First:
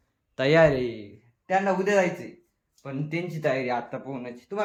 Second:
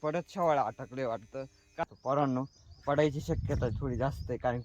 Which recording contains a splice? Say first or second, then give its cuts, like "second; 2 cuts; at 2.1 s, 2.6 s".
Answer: second; 1 cut; at 1.8 s